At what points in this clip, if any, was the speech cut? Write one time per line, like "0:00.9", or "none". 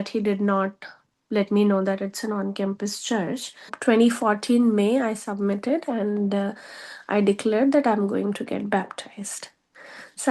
0:03.7

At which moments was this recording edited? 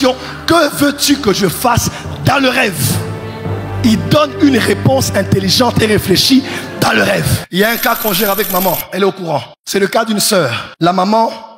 0:07.4
0:09.6
0:10.6

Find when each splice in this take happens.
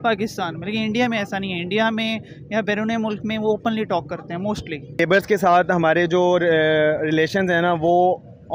0:05.0

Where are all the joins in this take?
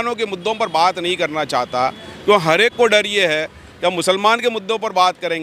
none

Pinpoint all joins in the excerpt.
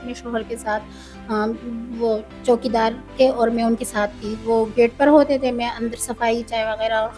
none

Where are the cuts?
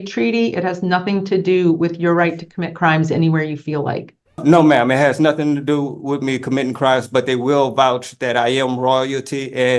0:04.4

